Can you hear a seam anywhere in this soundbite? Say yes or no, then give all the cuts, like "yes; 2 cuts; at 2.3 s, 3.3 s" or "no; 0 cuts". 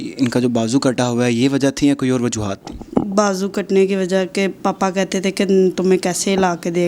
no; 0 cuts